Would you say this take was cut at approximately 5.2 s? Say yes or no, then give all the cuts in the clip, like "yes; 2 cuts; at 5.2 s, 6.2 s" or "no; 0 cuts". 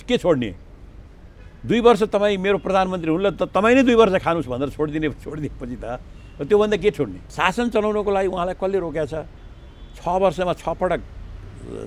no; 1 cut; at 7.2 s